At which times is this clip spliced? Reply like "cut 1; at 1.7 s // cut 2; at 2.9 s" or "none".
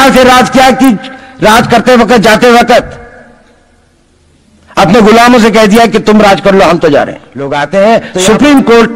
cut 1; at 7.6 s